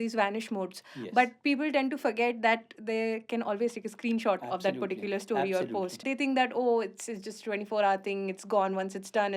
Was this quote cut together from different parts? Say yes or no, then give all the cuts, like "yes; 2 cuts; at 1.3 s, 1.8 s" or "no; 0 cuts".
yes; 1 cut; at 6.1 s